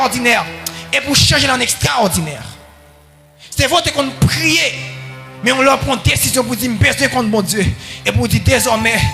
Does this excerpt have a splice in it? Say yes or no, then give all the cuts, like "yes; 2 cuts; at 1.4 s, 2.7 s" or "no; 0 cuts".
no; 0 cuts